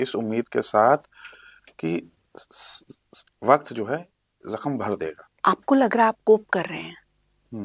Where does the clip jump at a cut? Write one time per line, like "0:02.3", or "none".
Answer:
0:05.3

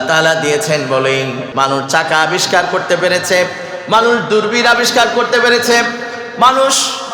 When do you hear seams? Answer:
0:01.4

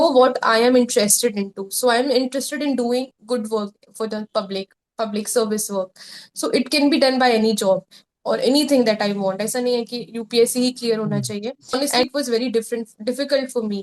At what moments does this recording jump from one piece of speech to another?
0:12.1

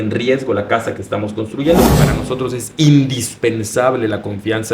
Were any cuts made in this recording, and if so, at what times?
0:01.9

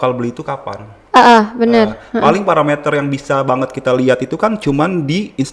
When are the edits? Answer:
none

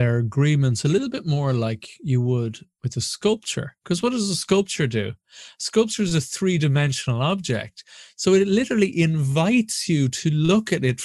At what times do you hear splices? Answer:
none

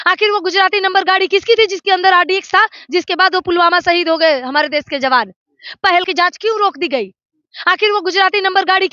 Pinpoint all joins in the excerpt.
none

